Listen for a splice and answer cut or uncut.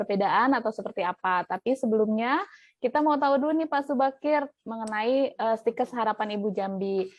cut